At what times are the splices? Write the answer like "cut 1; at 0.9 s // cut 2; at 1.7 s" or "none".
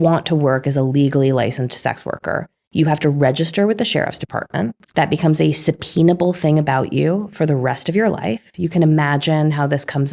cut 1; at 4.8 s